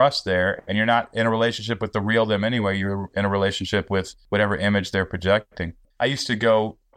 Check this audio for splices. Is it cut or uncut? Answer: cut